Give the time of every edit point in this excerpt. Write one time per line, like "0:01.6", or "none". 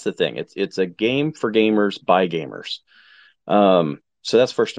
none